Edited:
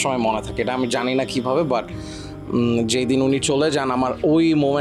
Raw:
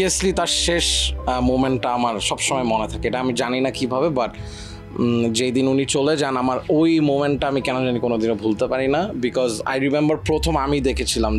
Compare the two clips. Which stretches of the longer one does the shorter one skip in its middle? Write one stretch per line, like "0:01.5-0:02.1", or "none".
none